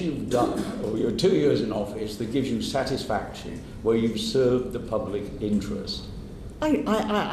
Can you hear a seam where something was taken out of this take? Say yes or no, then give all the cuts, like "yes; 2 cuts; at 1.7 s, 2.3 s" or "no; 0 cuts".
no; 0 cuts